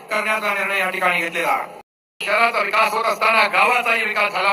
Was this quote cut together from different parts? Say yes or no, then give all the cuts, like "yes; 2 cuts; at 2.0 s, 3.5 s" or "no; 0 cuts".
yes; 1 cut; at 2.2 s